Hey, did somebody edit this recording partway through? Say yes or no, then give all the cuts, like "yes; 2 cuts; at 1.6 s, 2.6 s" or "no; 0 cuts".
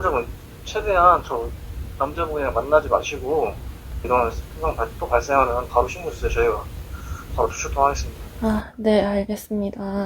yes; 1 cut; at 4.0 s